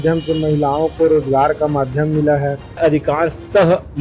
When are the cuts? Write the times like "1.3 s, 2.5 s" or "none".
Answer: 2.8 s